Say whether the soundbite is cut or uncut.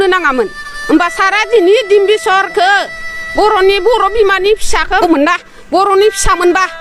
cut